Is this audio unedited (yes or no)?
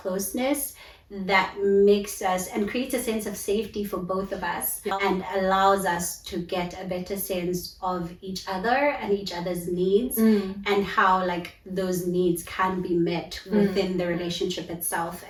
yes